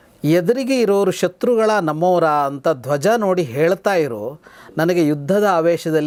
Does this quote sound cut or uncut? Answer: uncut